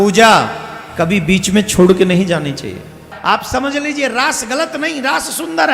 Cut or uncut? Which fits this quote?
cut